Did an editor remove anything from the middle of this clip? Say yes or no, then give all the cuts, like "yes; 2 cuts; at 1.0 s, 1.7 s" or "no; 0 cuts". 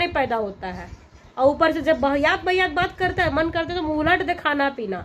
no; 0 cuts